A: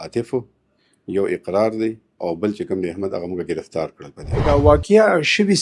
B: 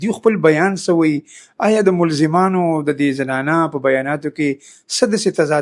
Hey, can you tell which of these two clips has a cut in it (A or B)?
A